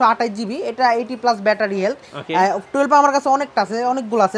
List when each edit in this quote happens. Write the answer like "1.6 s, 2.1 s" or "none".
none

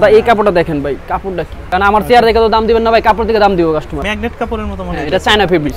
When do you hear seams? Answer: 1.5 s, 4.0 s

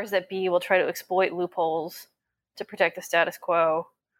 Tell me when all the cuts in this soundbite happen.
none

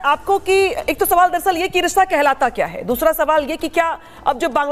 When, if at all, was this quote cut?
none

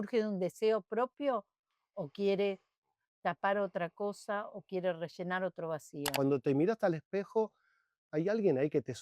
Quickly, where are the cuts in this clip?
6.1 s

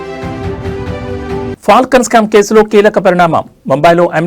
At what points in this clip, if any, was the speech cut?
1.3 s

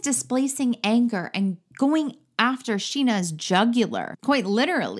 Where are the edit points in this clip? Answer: 4.1 s

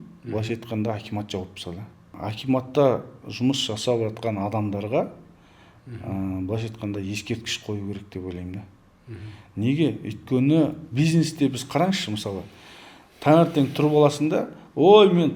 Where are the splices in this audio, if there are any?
2.1 s

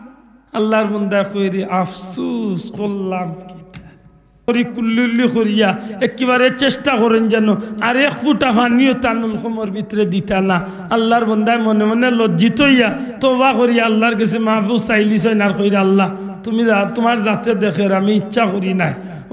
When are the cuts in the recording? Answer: 4.5 s

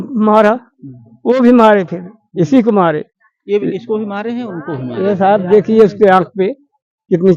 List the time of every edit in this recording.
none

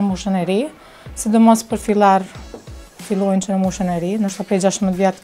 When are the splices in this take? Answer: none

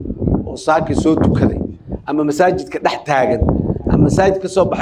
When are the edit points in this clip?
none

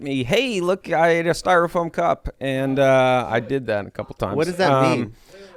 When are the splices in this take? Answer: none

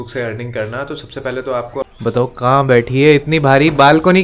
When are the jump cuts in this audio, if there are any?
1.9 s

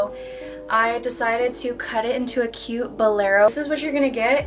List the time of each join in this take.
3.5 s

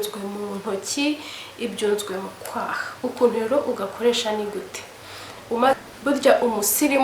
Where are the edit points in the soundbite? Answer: 5.7 s

